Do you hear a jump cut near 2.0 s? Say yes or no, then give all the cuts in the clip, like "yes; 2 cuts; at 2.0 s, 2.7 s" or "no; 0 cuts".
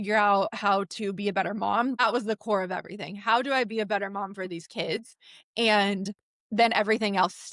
yes; 1 cut; at 2.0 s